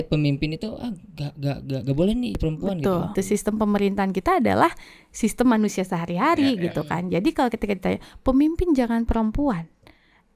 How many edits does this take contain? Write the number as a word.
two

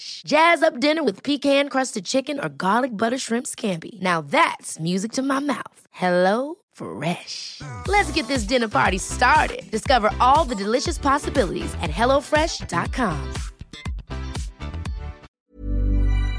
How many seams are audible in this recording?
one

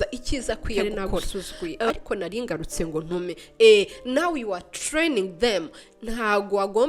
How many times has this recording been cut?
one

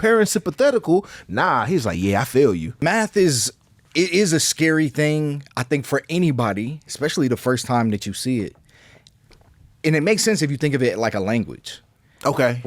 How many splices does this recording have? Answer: one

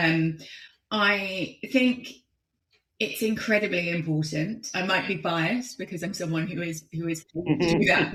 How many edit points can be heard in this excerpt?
zero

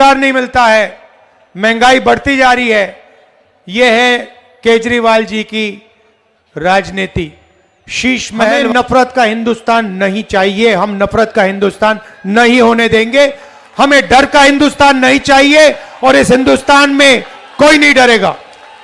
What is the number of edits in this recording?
one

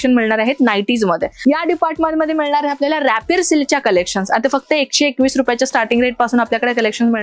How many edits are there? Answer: one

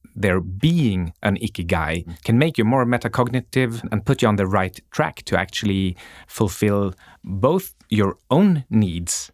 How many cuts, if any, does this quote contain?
two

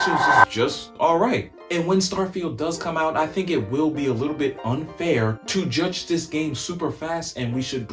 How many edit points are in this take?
two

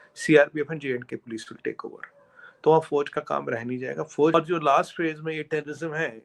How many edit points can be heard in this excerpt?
one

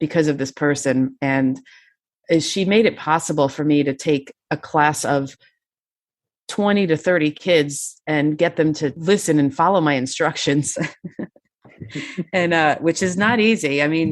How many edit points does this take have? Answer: one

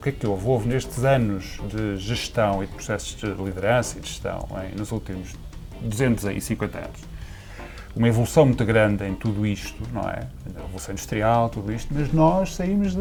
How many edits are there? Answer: zero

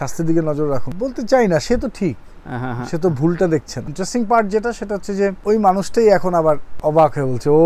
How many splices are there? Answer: four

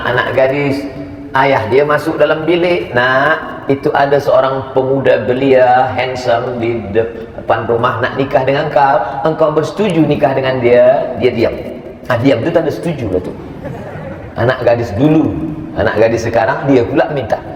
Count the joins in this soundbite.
zero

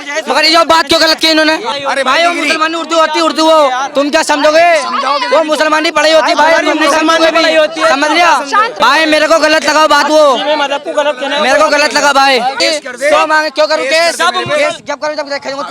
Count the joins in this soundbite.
three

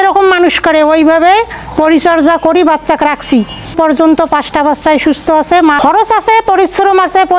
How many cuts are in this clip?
two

